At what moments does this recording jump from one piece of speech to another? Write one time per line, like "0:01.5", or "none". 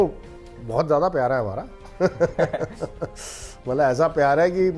none